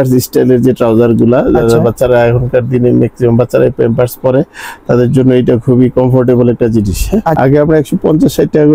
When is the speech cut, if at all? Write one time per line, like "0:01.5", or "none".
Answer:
0:07.4